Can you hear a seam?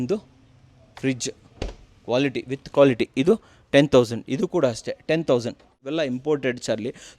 yes; 1 cut; at 5.8 s

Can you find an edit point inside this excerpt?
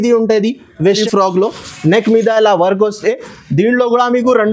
yes; 1 cut; at 1.0 s

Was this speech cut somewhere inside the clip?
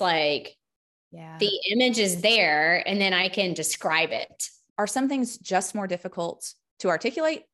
yes; 1 cut; at 4.5 s

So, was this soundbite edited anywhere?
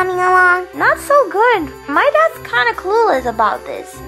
yes; 1 cut; at 1.9 s

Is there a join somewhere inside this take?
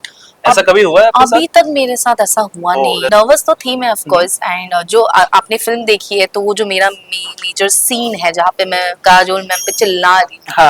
yes; 1 cut; at 3.0 s

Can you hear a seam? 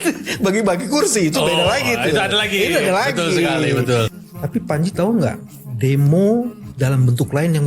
yes; 2 cuts; at 4.2 s, 6.6 s

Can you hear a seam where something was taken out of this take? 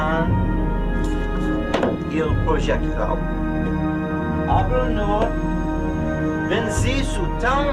yes; 1 cut; at 3.5 s

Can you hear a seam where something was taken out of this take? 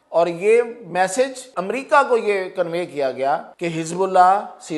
yes; 2 cuts; at 1.5 s, 3.5 s

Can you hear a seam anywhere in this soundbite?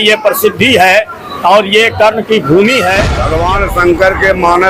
yes; 1 cut; at 3.2 s

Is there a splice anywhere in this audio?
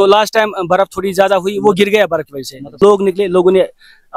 yes; 1 cut; at 2.7 s

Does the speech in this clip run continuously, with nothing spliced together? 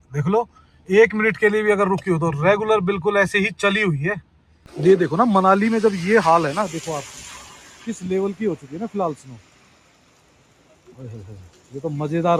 no; 1 cut; at 4.6 s

